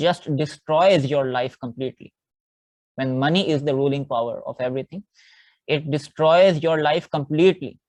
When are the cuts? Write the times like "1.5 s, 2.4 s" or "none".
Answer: none